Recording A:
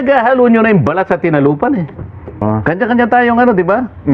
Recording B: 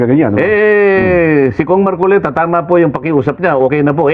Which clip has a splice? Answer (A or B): A